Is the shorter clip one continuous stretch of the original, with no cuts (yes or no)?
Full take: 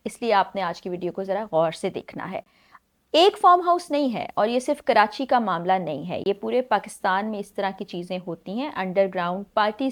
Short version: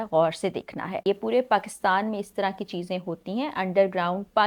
no